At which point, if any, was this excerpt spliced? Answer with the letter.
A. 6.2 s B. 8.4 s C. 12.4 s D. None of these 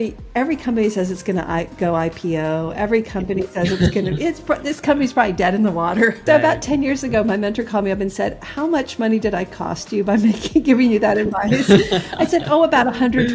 A